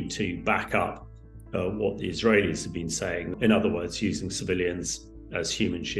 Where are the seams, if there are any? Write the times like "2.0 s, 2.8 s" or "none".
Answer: 3.3 s